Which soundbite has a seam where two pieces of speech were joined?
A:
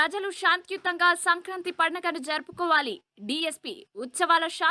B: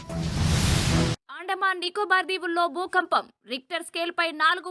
B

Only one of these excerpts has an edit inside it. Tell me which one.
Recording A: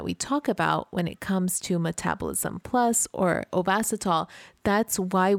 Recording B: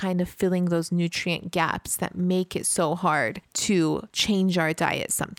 B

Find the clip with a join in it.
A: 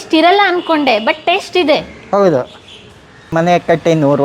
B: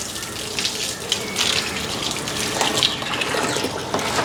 A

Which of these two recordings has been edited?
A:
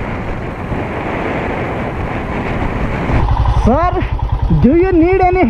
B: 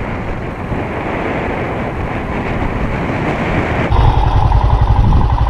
A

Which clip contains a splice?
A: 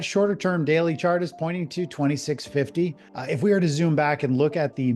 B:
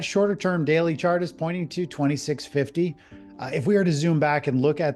A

